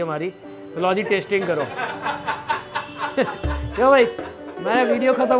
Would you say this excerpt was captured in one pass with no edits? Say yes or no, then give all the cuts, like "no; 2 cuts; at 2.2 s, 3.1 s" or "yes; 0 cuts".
yes; 0 cuts